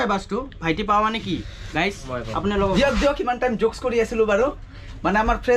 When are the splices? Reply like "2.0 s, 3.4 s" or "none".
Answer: none